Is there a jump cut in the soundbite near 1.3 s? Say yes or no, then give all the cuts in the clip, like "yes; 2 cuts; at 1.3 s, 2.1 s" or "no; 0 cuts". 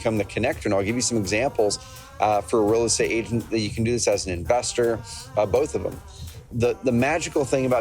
no; 1 cut; at 6.5 s